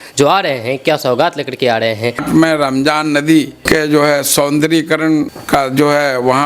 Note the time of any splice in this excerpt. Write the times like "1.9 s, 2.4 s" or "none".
2.2 s, 3.6 s, 5.4 s